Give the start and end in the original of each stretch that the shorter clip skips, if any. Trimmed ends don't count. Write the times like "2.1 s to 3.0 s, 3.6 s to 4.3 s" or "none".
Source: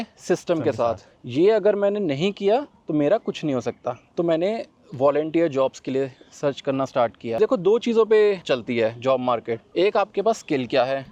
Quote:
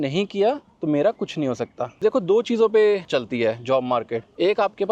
4.1 s to 7.4 s